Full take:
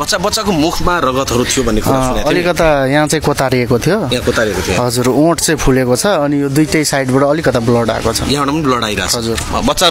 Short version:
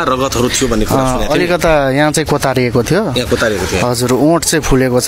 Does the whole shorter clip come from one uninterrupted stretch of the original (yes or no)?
yes